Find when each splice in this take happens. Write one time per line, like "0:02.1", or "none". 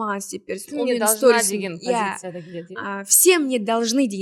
none

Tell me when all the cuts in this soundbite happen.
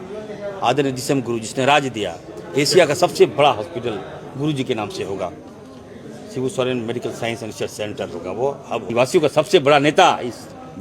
0:08.9

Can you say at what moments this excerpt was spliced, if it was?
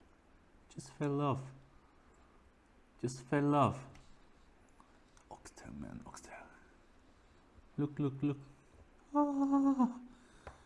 none

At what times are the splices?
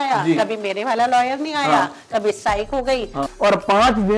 0:03.2

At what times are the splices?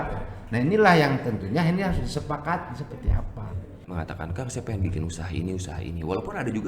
0:03.8

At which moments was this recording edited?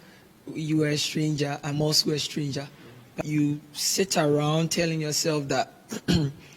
0:03.2

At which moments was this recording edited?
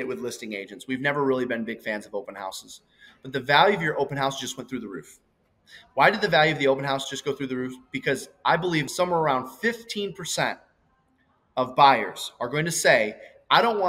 0:08.9

